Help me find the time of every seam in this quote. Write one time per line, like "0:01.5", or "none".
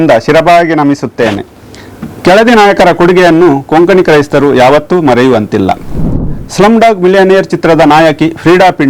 0:06.2

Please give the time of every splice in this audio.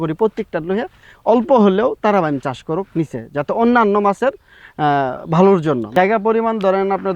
0:05.8

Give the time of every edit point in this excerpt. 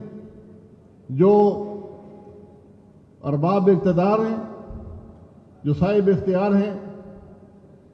none

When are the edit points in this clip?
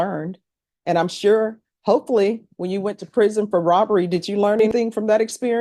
0:04.7

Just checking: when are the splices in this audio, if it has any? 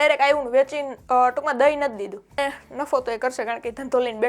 0:02.4

